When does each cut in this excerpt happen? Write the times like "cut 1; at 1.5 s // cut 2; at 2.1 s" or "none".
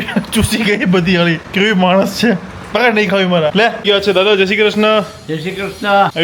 cut 1; at 1.4 s // cut 2; at 3.8 s